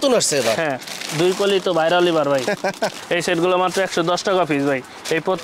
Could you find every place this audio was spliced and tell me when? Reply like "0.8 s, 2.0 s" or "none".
3.0 s